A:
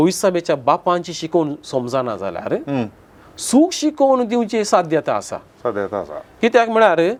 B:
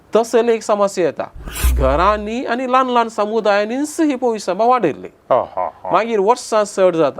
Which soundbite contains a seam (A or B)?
B